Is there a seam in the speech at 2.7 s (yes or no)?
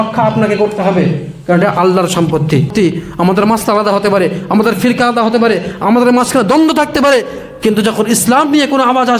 yes